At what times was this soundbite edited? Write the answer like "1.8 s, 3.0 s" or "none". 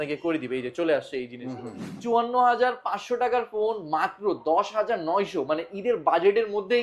1.9 s